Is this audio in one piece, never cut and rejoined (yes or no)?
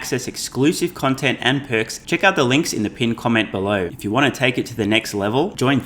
no